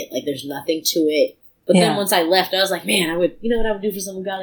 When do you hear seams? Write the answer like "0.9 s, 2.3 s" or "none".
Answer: 1.5 s

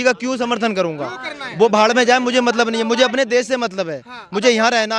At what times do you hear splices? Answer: none

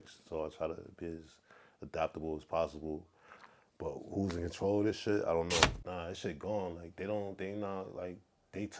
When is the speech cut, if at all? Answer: 5.8 s

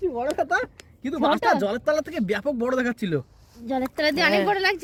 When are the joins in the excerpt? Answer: none

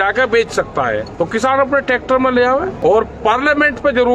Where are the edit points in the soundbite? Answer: 1.1 s, 2.7 s

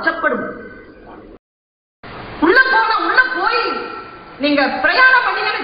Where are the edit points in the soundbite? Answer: 1.4 s

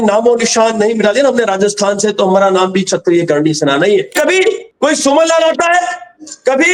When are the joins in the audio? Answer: 4.1 s

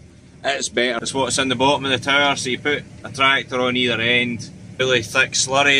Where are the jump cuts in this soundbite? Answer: 1.0 s, 4.8 s

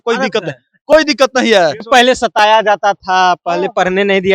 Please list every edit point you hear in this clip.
1.8 s

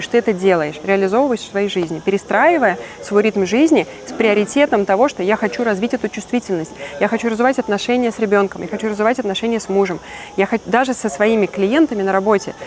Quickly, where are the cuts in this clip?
none

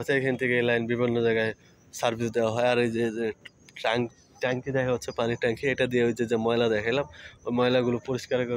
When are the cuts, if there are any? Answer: none

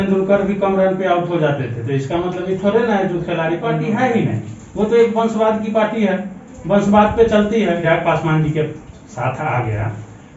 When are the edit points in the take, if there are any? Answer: 3.7 s, 7.8 s

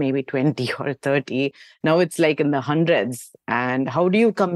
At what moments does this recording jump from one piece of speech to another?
none

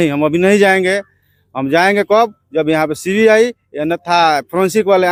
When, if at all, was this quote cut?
none

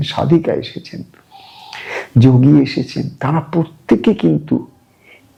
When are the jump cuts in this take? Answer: none

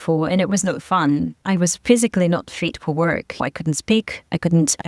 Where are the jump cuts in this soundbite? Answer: 1.3 s

